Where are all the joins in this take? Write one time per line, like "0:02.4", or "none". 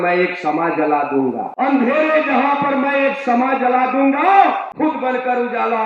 0:01.5
0:04.7